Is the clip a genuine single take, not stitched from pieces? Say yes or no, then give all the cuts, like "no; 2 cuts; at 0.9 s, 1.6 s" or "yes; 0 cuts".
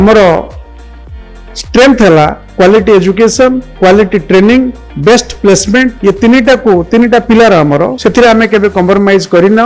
no; 5 cuts; at 2.4 s, 3.7 s, 4.8 s, 6.0 s, 7.9 s